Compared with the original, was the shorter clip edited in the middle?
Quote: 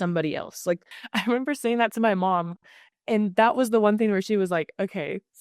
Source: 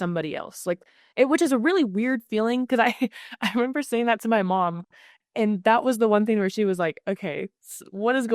yes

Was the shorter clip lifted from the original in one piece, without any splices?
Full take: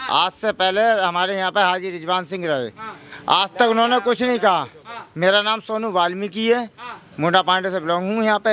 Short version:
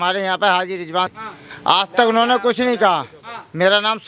no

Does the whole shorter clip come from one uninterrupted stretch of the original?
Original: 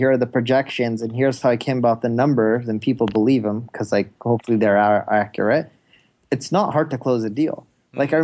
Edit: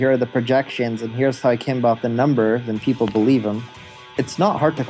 no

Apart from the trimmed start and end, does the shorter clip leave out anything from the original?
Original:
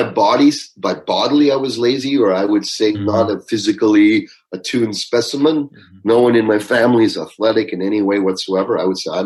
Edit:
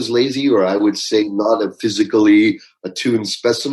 no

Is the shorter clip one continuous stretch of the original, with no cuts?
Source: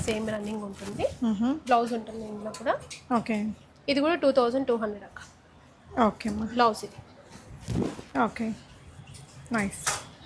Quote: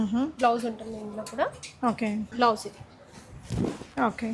no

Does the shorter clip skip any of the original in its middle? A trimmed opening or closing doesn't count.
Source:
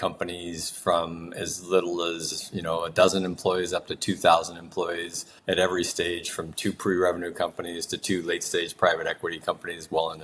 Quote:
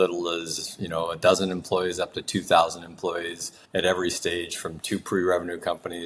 no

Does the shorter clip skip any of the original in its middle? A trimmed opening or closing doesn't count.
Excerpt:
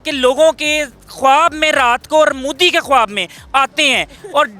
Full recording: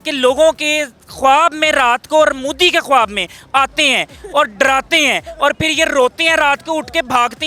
no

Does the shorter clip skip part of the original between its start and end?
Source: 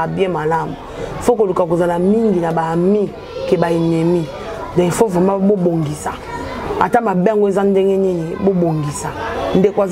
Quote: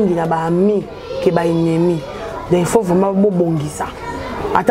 no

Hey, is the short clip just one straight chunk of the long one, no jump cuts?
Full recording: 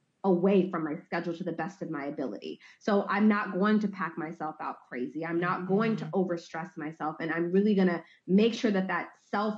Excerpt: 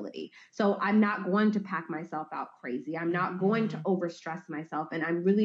yes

